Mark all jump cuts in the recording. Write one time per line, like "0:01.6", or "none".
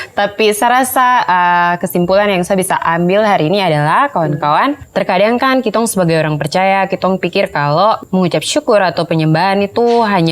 0:04.8
0:08.0